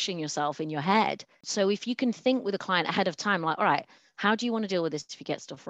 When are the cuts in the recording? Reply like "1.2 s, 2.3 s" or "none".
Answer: 1.4 s